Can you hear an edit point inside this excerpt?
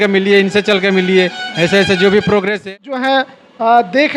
yes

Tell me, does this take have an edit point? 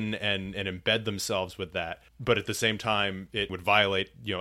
yes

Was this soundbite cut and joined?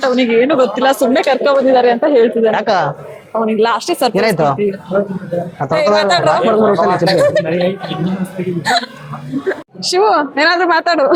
no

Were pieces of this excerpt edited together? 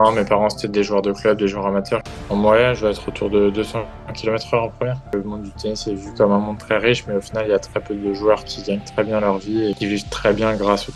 yes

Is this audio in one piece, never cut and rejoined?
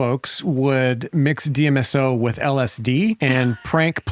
no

